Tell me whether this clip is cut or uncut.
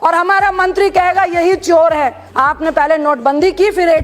cut